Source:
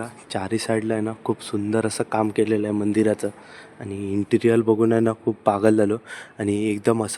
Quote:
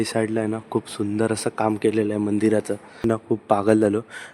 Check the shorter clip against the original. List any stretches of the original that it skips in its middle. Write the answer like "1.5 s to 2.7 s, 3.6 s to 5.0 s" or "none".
3.6 s to 5.0 s